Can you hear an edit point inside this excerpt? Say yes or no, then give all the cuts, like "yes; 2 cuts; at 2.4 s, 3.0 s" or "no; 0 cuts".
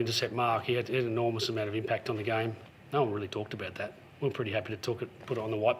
yes; 1 cut; at 2.7 s